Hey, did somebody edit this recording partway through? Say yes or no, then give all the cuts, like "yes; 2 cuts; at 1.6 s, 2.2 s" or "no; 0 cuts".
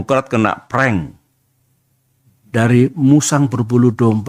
no; 0 cuts